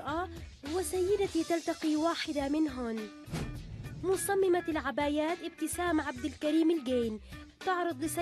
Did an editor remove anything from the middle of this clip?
yes; 1 cut; at 3.5 s

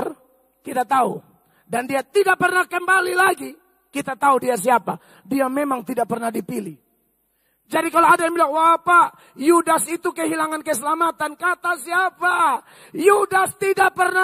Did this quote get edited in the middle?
no; 0 cuts

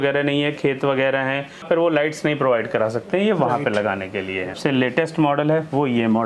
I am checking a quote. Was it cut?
yes; 2 cuts; at 1.6 s, 4.6 s

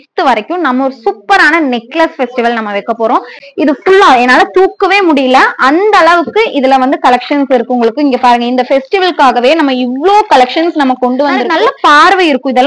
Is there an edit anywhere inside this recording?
yes; 2 cuts; at 3.4 s, 11.5 s

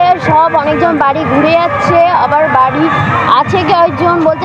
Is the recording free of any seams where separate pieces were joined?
yes; 0 cuts

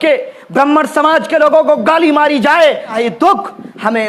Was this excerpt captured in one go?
no; 1 cut; at 2.9 s

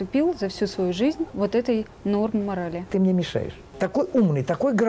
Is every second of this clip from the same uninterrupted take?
no; 2 cuts; at 1.3 s, 3.1 s

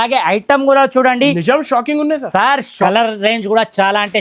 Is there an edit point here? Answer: yes; 1 cut; at 2.7 s

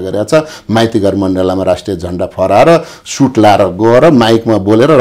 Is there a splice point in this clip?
no; 0 cuts

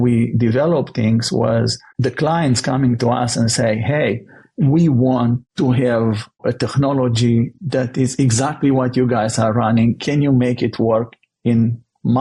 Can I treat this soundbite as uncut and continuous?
no; 3 cuts; at 1.8 s, 5.5 s, 6.4 s

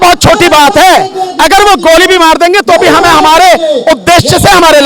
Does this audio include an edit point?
no; 0 cuts

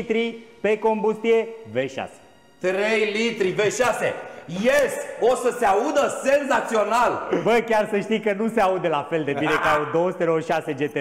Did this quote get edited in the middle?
no; 0 cuts

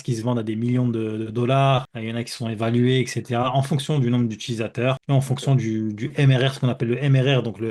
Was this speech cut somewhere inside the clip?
no; 0 cuts

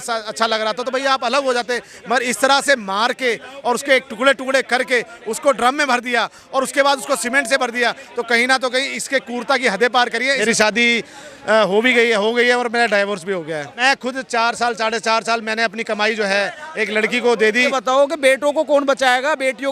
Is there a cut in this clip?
yes; 3 cuts; at 10.4 s, 13.8 s, 17.8 s

